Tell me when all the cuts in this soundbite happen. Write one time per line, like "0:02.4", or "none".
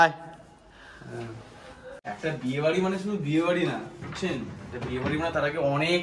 0:02.0